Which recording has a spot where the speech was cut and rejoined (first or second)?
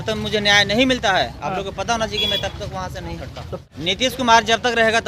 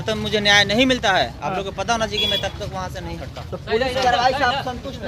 first